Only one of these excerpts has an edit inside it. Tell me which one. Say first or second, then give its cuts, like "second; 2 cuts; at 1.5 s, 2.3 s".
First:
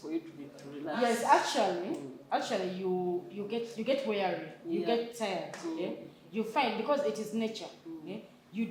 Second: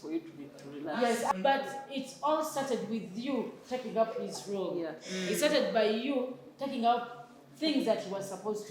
second; 1 cut; at 1.3 s